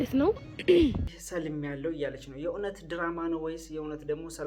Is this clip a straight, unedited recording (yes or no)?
no